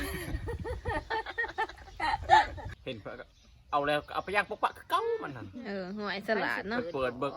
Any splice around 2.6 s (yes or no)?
yes